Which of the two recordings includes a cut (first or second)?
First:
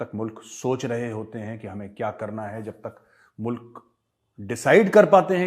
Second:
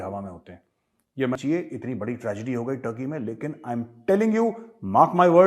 second